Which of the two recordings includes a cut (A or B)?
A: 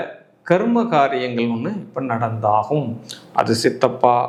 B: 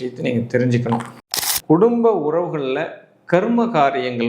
B